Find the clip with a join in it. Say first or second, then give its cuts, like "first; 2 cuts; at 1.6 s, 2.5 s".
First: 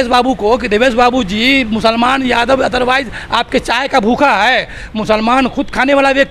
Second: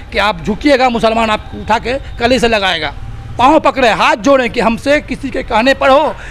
second; 1 cut; at 3.2 s